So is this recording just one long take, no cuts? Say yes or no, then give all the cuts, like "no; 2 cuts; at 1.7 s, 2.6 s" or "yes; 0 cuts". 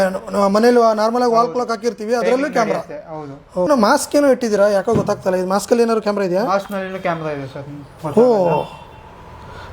no; 1 cut; at 3.7 s